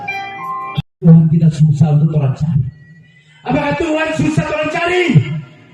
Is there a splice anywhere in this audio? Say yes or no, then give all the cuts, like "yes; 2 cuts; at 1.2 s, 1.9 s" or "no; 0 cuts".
yes; 1 cut; at 1.0 s